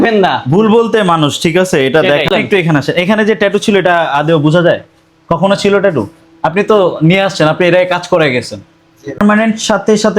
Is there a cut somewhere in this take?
yes; 2 cuts; at 2.3 s, 9.2 s

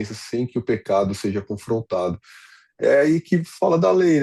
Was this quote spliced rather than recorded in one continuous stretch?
no; 0 cuts

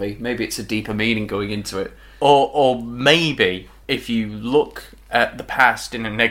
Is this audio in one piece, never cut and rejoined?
yes; 0 cuts

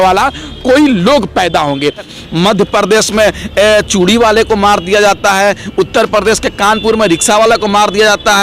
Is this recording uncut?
no; 1 cut; at 2.2 s

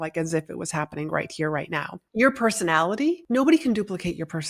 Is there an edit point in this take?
yes; 2 cuts; at 2.0 s, 3.2 s

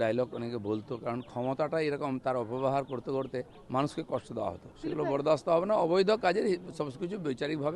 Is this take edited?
yes; 2 cuts; at 3.6 s, 4.7 s

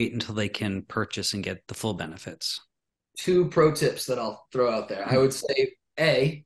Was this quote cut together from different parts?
yes; 1 cut; at 1.6 s

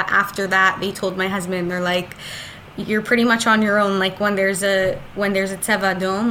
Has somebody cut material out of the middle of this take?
no; 0 cuts

